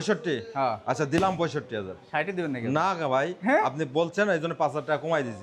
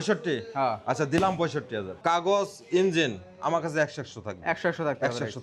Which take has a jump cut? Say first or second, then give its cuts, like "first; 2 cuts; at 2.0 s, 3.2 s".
second; 1 cut; at 1.9 s